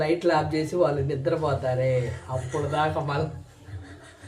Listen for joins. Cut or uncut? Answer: uncut